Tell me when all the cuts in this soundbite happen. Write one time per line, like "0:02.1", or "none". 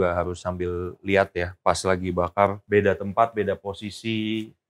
0:02.6